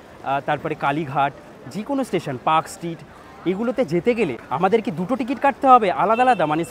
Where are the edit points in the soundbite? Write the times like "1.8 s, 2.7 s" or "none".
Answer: 4.4 s